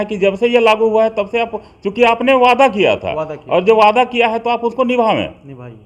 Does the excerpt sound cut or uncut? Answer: uncut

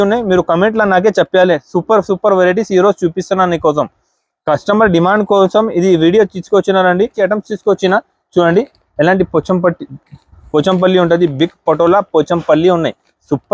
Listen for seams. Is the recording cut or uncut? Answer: cut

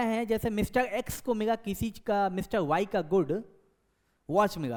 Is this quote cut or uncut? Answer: uncut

